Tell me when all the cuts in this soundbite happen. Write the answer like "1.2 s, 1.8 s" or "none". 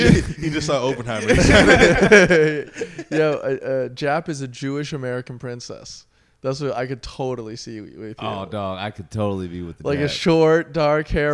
none